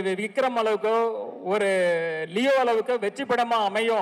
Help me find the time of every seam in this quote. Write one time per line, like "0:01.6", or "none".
none